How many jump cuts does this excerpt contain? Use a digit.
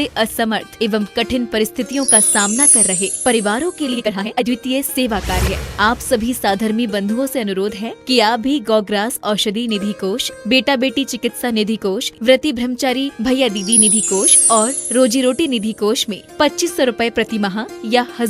1